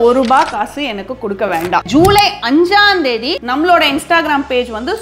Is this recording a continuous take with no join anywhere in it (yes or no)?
no